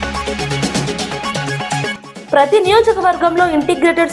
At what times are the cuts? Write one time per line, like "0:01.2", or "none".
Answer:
0:01.9